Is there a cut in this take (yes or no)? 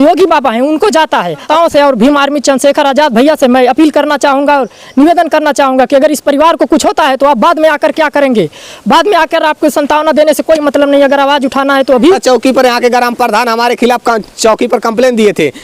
yes